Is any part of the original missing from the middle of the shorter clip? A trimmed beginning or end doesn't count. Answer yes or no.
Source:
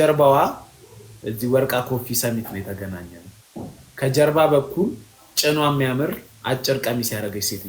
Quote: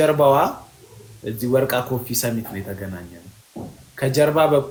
no